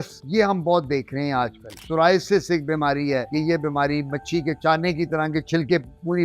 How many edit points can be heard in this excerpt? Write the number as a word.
two